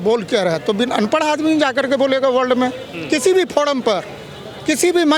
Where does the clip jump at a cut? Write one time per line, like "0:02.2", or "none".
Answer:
none